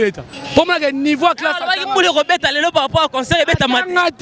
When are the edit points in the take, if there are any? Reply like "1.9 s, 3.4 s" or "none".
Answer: none